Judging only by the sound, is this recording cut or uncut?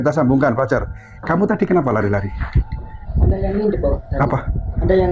uncut